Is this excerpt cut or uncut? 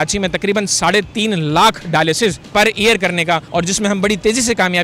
cut